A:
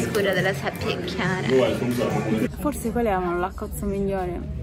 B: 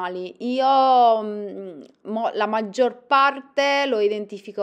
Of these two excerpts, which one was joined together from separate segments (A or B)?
A